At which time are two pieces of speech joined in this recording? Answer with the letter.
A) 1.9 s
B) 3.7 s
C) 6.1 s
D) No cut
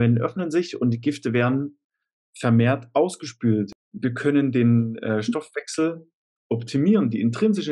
B